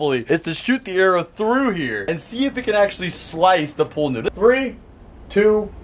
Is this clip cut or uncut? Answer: cut